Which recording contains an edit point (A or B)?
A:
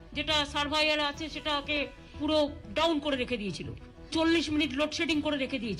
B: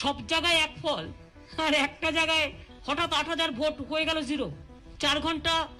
A